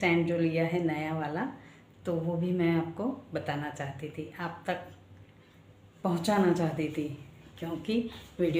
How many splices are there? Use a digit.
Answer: 0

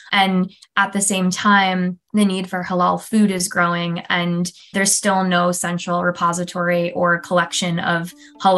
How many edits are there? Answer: 2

